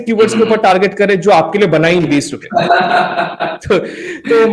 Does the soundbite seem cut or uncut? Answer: cut